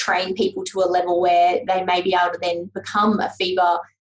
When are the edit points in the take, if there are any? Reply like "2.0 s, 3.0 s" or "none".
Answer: 1.6 s